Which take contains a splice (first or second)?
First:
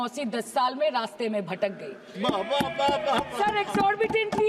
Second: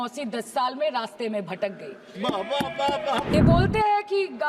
second